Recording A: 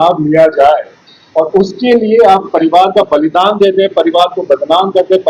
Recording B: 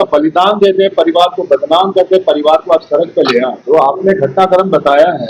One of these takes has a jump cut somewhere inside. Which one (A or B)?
B